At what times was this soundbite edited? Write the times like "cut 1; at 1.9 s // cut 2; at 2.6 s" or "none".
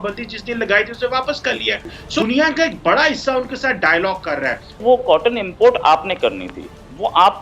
cut 1; at 2.2 s // cut 2; at 4.8 s